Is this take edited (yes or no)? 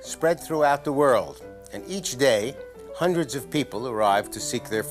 yes